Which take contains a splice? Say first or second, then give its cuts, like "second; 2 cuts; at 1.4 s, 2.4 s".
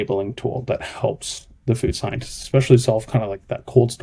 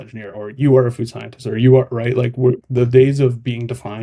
second; 1 cut; at 2.6 s